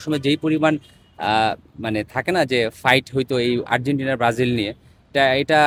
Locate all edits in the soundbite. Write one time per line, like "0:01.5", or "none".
none

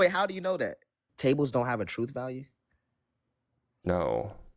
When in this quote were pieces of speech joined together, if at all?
0:01.1

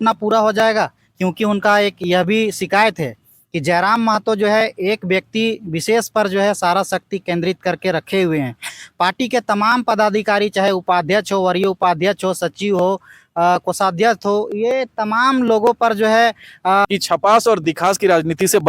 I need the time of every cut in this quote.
0:16.8

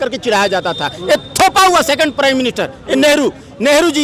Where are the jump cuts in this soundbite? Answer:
none

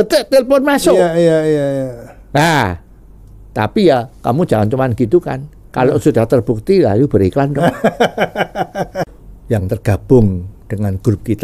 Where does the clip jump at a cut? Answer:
0:09.1

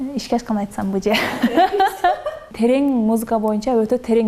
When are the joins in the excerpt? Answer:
0:02.5

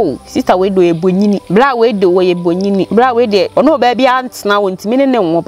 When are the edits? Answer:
0:01.4
0:02.9
0:03.5

